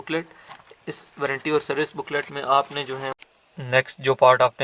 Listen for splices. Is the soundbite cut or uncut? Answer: cut